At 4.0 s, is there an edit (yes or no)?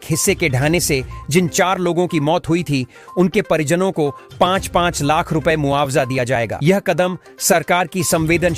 no